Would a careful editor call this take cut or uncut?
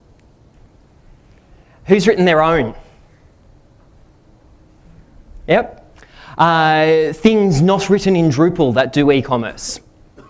cut